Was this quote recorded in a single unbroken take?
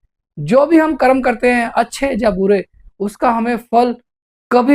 yes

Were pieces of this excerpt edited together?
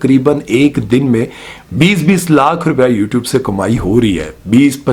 no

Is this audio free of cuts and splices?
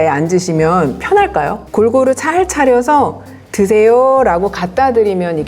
no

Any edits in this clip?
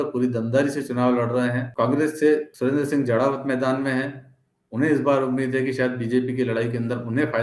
yes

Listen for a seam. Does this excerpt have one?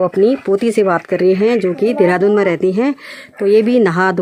no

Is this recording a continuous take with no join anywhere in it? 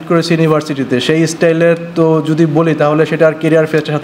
yes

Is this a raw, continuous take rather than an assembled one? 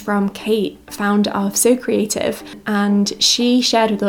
yes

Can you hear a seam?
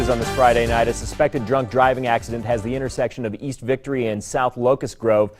no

